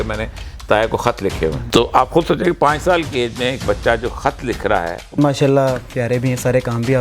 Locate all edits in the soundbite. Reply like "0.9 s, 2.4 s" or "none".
1.6 s, 5.2 s